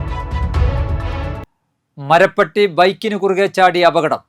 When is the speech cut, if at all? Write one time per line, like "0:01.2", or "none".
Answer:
0:01.4